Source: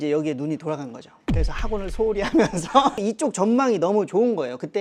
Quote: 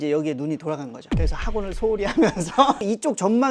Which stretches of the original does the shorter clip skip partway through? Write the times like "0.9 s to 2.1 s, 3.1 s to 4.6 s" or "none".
0.9 s to 1.1 s